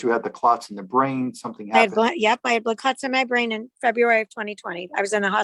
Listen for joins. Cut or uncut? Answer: uncut